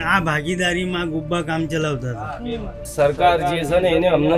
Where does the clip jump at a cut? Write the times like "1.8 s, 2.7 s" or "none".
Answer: 2.8 s